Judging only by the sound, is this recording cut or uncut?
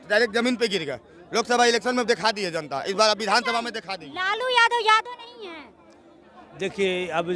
uncut